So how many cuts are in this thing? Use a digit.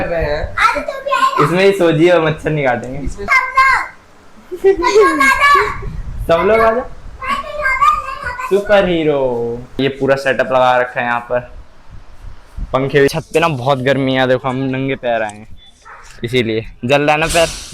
3